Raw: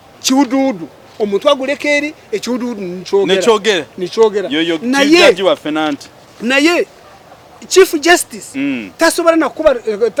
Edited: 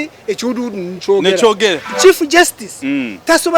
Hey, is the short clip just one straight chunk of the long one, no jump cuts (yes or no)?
no